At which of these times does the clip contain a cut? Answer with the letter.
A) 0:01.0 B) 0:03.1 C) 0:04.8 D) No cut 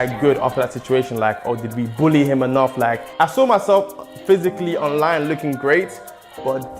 B